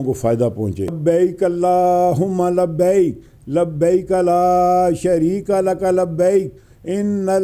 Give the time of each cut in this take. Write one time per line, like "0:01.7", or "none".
0:01.0